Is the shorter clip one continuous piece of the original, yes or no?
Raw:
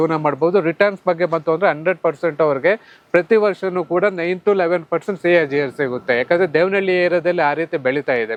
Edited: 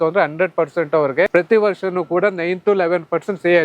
no